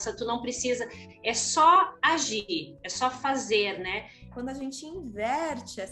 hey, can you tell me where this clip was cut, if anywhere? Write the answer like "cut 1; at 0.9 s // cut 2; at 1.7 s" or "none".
cut 1; at 4.3 s